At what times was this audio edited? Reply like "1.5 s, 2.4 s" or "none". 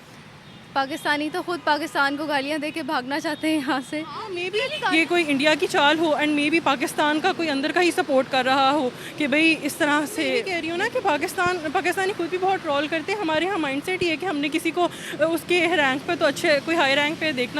4.4 s, 10.5 s